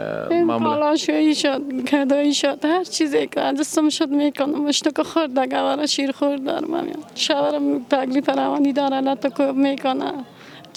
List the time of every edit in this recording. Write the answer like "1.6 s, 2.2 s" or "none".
none